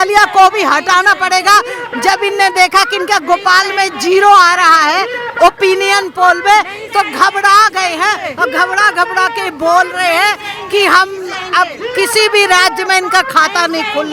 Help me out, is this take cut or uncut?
uncut